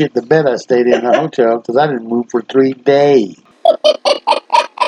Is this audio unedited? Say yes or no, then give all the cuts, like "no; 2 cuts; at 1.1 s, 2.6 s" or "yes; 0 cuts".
no; 1 cut; at 3.4 s